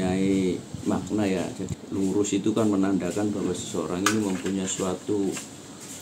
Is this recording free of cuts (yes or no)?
no